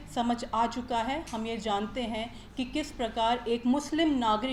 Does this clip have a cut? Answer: no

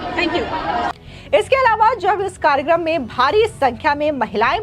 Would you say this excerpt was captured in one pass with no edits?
yes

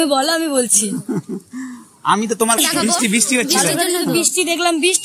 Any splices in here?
yes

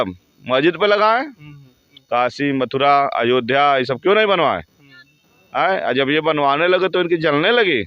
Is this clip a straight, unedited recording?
no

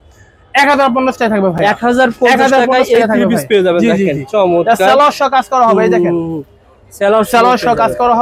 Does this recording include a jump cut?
no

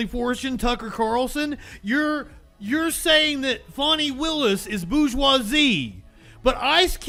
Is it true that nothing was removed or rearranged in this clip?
yes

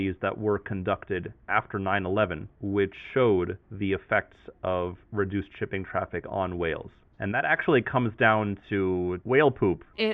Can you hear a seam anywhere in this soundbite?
yes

